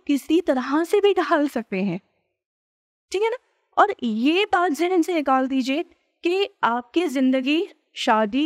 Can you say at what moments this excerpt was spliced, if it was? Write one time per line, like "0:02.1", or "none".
none